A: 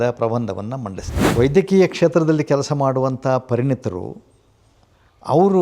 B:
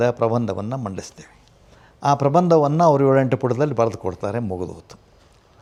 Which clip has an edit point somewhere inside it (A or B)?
A